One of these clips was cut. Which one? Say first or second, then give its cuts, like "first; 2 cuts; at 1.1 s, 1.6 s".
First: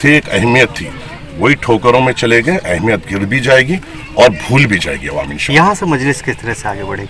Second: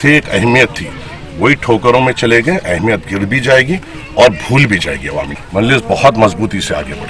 second; 1 cut; at 5.4 s